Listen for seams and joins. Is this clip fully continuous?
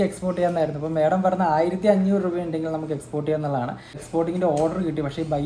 no; 1 cut; at 3.9 s

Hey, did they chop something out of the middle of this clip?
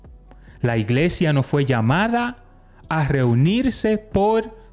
no; 0 cuts

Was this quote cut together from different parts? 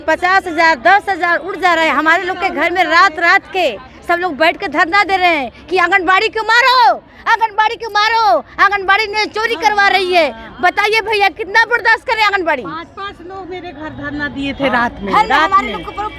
no; 0 cuts

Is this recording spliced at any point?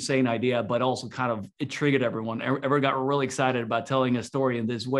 yes; 1 cut; at 1.6 s

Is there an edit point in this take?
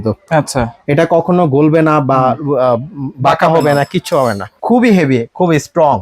yes; 1 cut; at 4.5 s

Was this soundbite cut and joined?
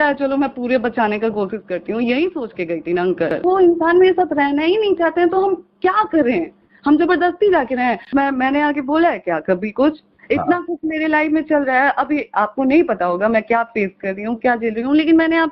yes; 2 cuts; at 3.4 s, 8.1 s

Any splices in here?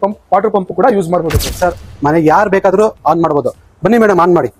yes; 1 cut; at 1.6 s

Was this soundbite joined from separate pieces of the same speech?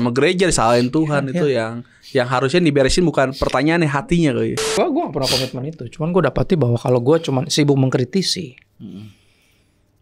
yes; 1 cut; at 4.6 s

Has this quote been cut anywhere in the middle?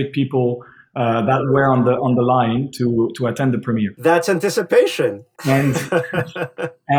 no; 0 cuts

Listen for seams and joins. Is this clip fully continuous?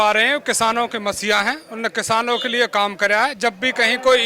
yes; 0 cuts

